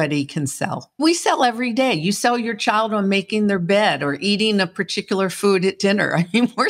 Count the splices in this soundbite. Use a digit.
1